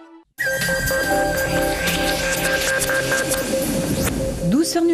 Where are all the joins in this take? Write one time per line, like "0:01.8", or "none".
0:02.8